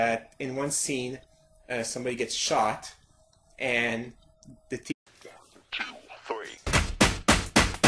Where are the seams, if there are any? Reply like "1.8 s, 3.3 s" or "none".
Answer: none